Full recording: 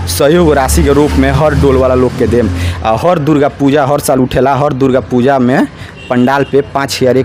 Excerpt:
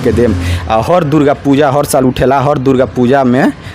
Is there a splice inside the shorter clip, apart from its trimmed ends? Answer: no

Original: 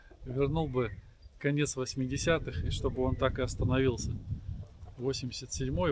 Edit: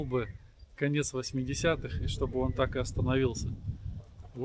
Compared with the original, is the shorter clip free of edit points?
yes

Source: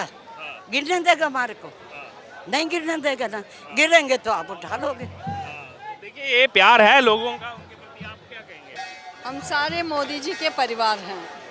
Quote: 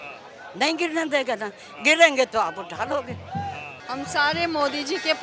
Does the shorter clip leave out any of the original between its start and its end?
yes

